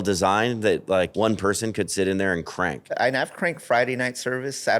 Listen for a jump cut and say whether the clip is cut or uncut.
cut